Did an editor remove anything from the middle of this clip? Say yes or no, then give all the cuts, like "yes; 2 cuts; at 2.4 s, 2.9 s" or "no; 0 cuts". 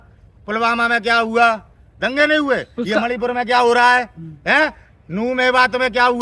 no; 0 cuts